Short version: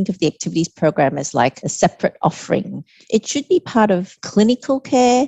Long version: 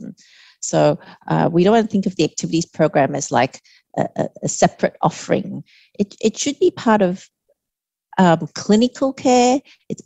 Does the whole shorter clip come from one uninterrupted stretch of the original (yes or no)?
no